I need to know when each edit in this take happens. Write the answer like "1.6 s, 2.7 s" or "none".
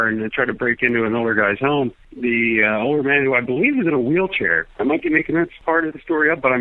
2.0 s, 5.6 s